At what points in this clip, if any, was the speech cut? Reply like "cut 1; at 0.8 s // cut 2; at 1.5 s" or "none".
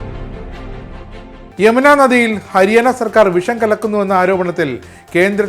cut 1; at 1.4 s